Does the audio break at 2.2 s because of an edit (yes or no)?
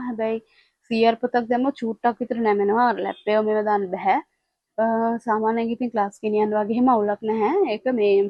no